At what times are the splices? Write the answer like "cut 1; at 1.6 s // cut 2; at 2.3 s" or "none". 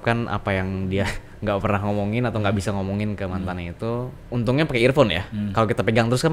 cut 1; at 4.2 s